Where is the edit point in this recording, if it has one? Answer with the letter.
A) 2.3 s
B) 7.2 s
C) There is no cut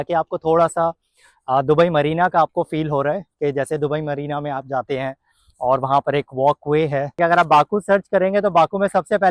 B